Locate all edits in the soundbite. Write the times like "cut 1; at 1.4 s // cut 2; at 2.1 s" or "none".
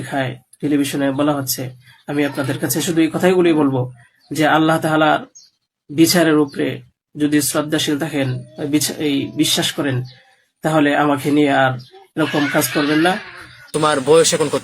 cut 1; at 13.7 s